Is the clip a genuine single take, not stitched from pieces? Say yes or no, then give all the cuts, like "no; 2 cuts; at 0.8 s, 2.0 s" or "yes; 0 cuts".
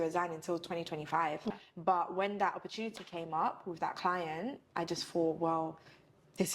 no; 1 cut; at 1.7 s